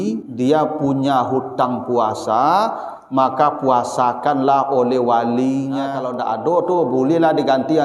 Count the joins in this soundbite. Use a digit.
1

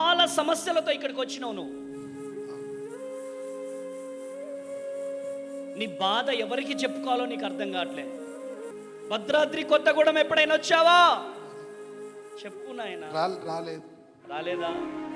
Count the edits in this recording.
1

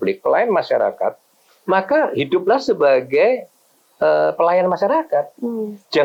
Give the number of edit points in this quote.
0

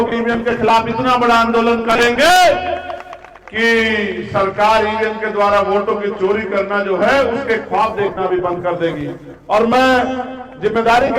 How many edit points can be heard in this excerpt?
0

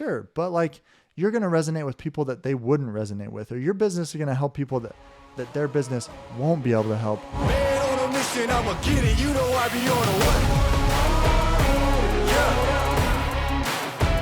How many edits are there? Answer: 1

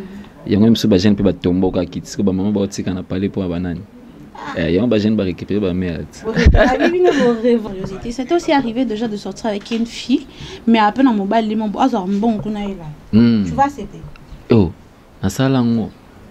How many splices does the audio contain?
1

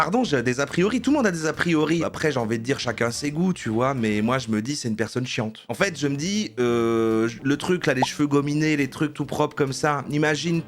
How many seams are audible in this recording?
2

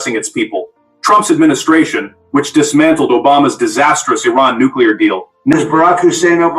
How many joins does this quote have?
1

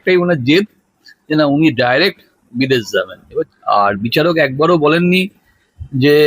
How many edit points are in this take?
1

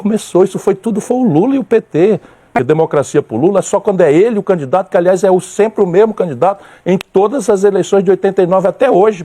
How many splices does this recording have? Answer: 1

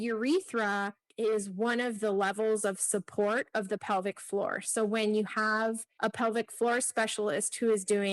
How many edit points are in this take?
2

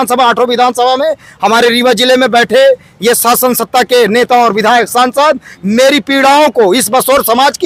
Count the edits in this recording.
0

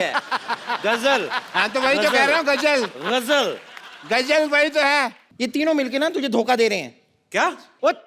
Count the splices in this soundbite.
1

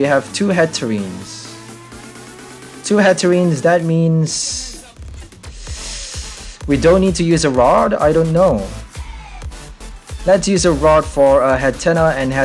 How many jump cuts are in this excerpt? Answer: 1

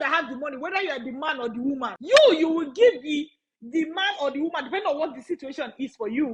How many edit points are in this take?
1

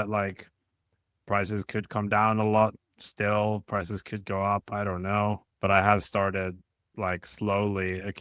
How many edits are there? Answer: 1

